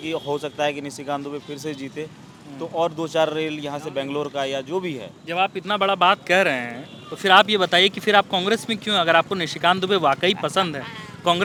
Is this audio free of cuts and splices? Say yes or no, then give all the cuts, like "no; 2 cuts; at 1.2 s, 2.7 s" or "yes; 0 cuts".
yes; 0 cuts